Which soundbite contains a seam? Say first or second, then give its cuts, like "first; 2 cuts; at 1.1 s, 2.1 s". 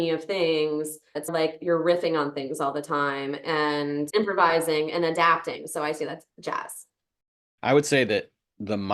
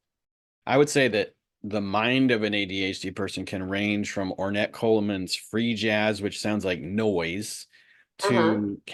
first; 2 cuts; at 1.3 s, 4.1 s